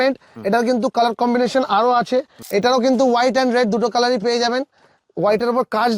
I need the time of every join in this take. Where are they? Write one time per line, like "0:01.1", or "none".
0:02.4